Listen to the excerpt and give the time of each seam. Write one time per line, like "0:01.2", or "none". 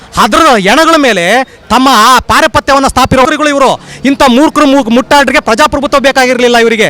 0:03.3